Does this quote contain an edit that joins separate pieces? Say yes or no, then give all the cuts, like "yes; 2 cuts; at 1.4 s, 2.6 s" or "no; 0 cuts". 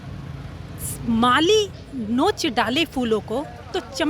no; 0 cuts